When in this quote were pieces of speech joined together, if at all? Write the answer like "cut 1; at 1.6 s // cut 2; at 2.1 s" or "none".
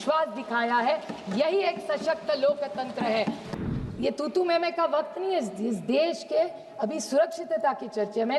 cut 1; at 3.4 s